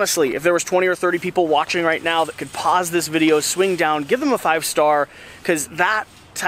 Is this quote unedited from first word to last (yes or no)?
yes